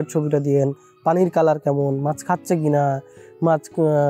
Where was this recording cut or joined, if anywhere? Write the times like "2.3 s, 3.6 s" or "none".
none